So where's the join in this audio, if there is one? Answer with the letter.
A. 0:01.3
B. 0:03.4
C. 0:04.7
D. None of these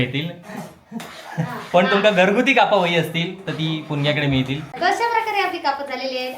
C